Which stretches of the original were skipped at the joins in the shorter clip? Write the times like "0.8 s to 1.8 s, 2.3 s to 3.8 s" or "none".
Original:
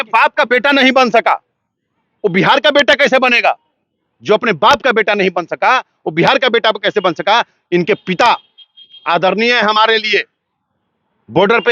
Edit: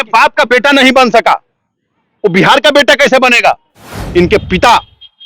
4.0 s to 7.6 s